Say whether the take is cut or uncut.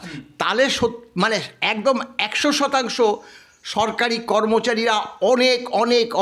uncut